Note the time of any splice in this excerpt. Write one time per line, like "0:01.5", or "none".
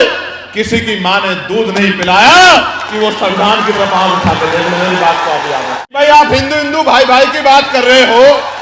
0:01.7
0:05.8
0:06.9